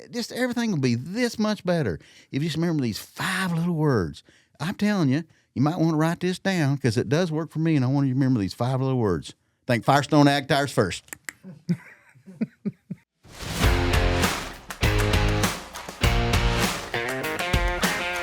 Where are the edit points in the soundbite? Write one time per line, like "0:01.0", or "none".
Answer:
0:12.9